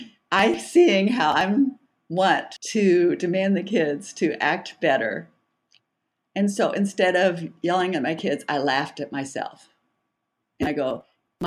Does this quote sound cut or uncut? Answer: cut